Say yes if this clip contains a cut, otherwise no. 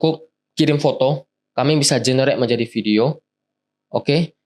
no